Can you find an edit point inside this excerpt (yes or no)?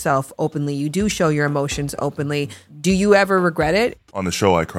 yes